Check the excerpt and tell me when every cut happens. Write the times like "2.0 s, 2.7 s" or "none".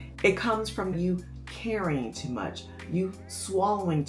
0.9 s